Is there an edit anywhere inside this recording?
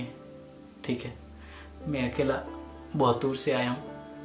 no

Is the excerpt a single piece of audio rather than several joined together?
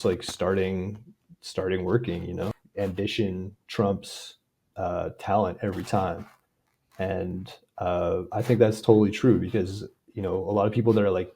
no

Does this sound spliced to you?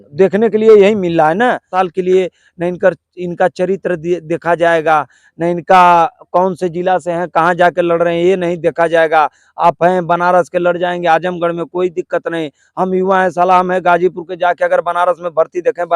yes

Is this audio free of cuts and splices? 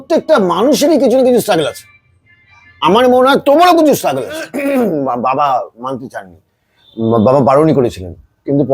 no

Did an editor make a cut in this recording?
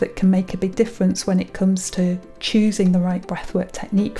no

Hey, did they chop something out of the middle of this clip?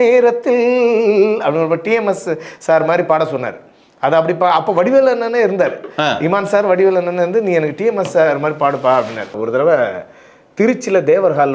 yes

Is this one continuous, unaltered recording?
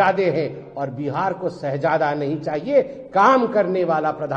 yes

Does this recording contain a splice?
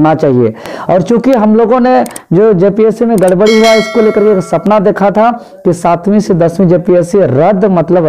no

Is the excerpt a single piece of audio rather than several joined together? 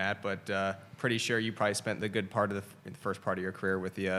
yes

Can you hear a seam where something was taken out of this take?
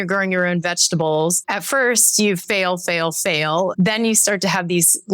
yes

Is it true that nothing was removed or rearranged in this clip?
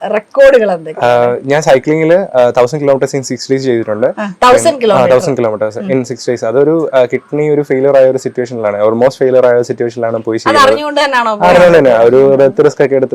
yes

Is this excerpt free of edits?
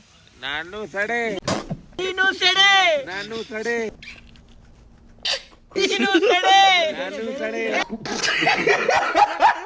yes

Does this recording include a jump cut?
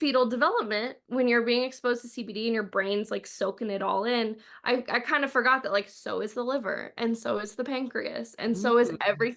no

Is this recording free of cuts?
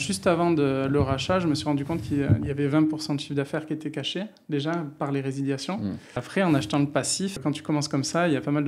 no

